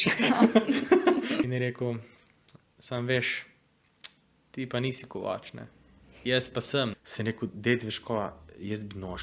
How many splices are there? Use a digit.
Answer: 2